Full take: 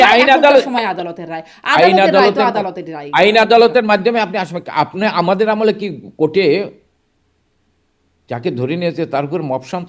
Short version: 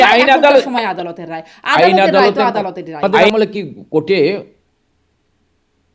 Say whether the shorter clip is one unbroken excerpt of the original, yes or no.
no